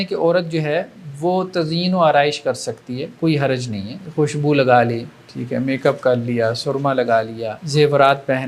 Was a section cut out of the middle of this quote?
yes; 2 cuts; at 4.0 s, 7.6 s

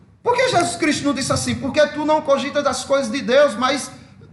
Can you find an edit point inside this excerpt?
no; 0 cuts

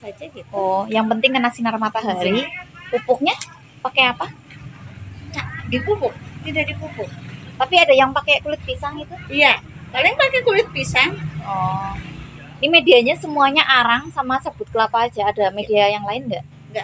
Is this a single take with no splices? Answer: yes; 0 cuts

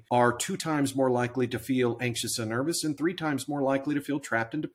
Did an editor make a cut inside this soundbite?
no; 0 cuts

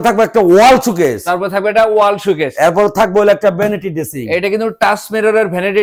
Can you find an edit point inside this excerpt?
no; 0 cuts

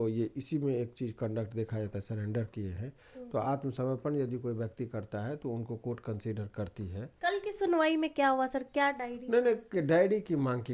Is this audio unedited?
no; 1 cut; at 7.0 s

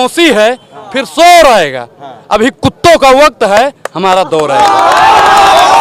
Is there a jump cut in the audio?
no; 0 cuts

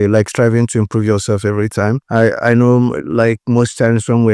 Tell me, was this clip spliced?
yes; 1 cut; at 2.0 s

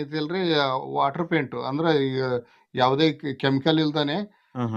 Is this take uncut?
yes; 0 cuts

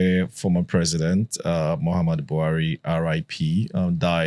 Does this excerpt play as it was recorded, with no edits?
yes; 0 cuts

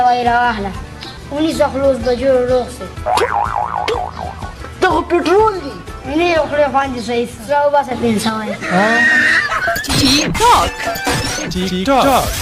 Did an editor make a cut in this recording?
no; 0 cuts

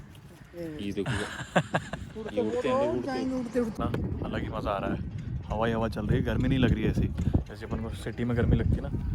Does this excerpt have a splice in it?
yes; 1 cut; at 3.8 s

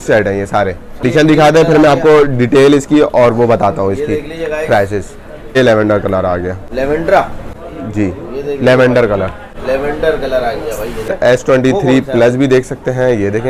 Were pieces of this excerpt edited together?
yes; 3 cuts; at 1.0 s, 5.6 s, 11.1 s

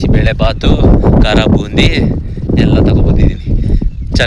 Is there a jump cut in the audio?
no; 0 cuts

